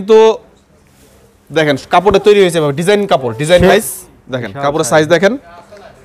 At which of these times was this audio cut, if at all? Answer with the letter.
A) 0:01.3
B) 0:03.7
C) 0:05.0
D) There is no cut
B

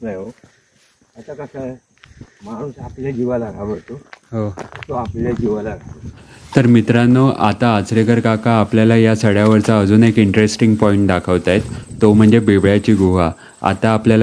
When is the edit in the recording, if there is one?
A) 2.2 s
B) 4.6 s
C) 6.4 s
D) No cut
C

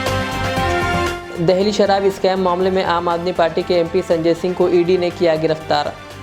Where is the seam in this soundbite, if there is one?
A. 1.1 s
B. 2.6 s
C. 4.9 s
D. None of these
A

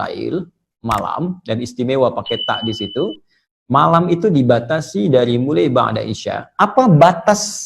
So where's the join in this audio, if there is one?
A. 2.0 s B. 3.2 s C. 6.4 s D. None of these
C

